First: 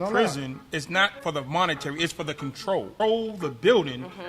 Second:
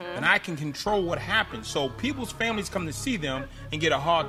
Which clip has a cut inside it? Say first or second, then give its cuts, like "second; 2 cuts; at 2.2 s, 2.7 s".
first; 2 cuts; at 1.1 s, 2.9 s